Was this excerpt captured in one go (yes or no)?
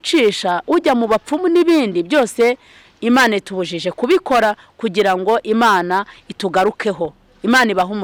yes